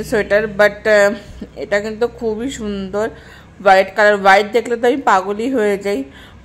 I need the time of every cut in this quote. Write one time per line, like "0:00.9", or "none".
none